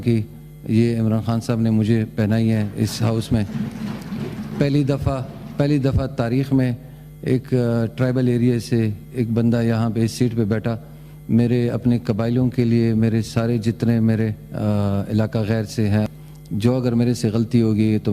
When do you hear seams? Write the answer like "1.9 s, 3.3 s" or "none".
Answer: 16.1 s